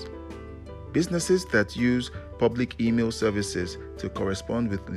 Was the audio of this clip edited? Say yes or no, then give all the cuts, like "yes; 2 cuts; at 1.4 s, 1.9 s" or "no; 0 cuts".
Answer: no; 0 cuts